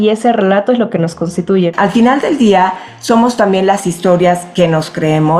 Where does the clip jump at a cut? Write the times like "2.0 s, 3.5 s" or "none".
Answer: 1.7 s

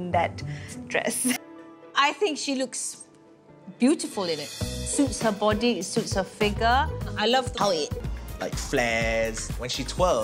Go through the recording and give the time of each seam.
none

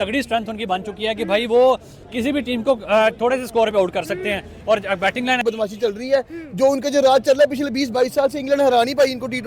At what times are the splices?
5.4 s

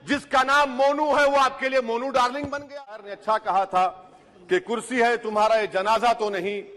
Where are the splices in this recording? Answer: 3.1 s

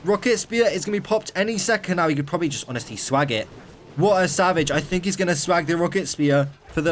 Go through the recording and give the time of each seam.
none

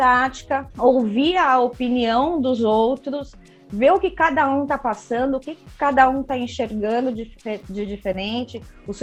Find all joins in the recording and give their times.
none

